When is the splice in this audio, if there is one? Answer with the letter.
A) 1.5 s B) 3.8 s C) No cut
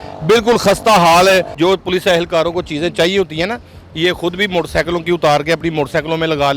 A